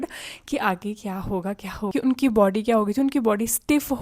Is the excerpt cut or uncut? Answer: cut